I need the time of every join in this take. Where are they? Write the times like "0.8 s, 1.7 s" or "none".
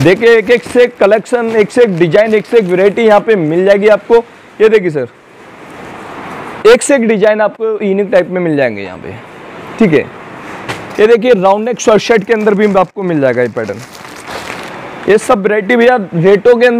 none